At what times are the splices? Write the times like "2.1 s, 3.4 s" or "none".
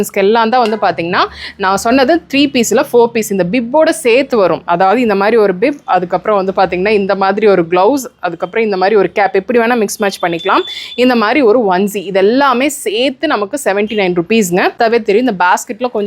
14.8 s